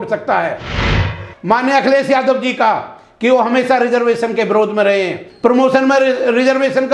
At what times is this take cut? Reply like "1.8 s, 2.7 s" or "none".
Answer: 1.0 s, 5.2 s